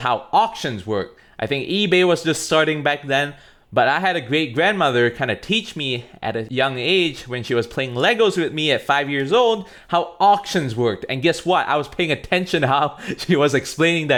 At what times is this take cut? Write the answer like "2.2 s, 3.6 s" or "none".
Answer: none